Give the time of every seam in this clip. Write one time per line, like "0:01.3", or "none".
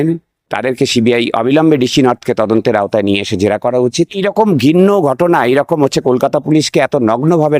0:04.2